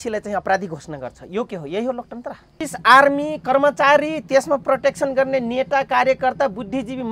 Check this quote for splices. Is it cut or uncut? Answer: cut